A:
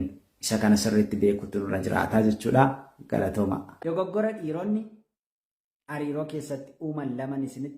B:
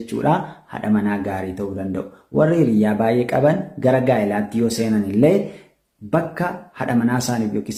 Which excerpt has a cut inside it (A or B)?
A